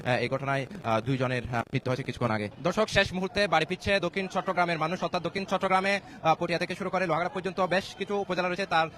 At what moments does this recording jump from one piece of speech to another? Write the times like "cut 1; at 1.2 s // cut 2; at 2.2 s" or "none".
cut 1; at 2.5 s